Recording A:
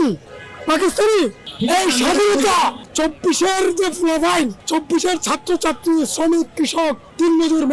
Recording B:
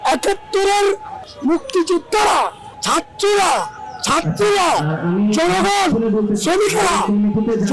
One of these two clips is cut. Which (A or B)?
A